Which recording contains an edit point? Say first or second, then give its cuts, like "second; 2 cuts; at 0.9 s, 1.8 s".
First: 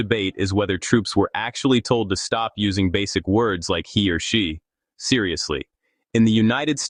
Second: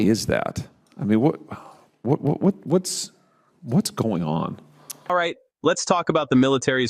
second; 1 cut; at 5.1 s